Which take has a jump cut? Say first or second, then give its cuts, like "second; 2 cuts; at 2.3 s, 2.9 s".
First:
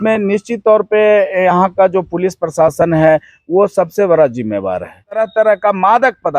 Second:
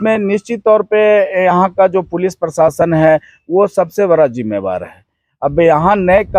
first; 1 cut; at 5.2 s